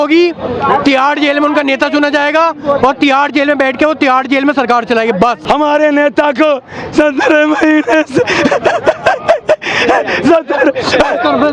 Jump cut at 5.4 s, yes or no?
yes